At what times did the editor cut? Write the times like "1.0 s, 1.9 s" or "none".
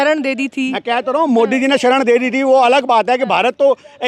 none